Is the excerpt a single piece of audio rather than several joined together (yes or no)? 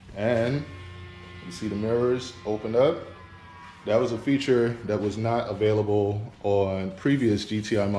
yes